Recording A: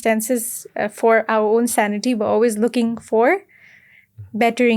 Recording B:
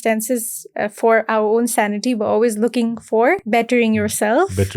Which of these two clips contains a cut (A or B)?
B